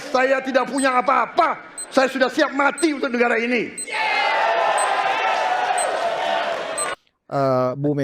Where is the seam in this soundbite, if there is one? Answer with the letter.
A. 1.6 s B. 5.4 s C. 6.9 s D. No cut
C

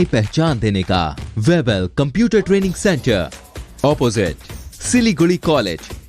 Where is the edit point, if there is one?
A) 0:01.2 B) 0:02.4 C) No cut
A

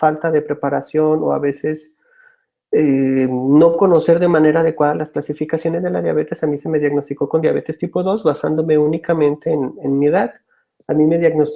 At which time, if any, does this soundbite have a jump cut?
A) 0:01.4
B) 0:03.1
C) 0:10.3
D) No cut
A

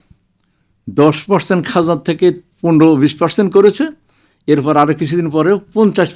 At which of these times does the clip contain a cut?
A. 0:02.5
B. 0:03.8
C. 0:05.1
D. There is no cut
A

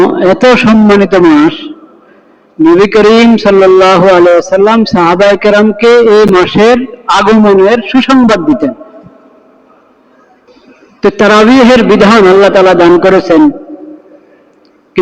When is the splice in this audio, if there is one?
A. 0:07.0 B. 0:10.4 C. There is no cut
B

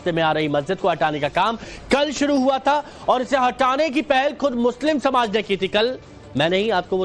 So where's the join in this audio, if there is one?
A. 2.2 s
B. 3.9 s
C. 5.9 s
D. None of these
B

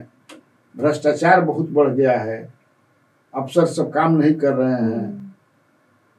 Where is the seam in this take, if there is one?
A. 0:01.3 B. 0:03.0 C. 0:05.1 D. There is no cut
D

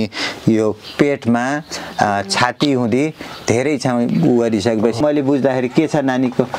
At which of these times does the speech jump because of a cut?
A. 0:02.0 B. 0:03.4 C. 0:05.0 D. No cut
C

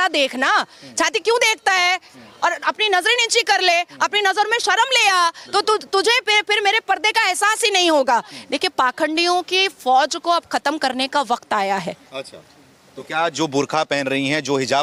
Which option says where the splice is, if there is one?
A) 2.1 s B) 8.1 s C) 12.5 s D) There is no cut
D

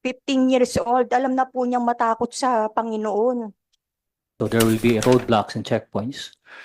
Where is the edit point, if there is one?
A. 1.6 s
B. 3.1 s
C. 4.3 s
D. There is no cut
C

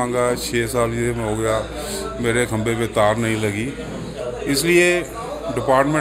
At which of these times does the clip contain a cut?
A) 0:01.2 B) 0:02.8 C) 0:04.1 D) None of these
D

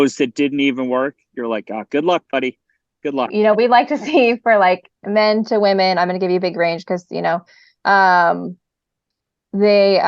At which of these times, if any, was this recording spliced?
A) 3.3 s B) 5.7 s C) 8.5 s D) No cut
A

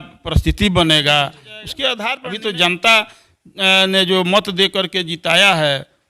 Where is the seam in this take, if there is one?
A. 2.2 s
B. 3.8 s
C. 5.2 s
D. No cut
A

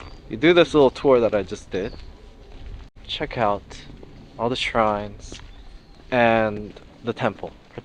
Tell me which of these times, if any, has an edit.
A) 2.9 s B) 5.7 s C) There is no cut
A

